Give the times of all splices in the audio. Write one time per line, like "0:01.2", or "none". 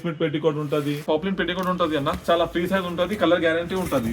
0:01.0